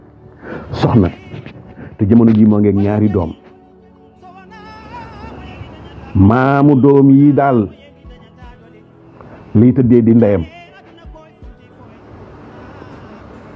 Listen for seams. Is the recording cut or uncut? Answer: cut